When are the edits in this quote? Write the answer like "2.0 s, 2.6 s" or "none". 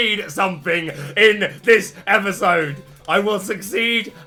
none